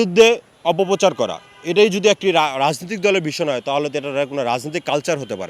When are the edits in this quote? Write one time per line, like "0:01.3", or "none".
none